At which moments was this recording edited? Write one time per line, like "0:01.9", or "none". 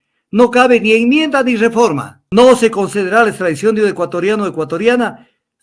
0:02.1